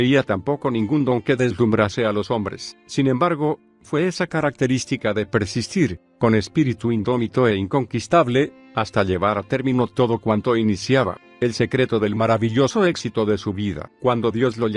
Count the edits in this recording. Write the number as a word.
one